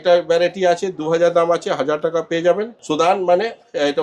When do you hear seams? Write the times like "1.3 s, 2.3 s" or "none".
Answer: 2.7 s